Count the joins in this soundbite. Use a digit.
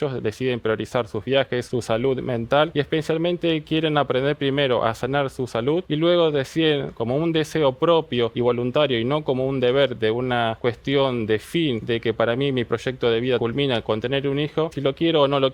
8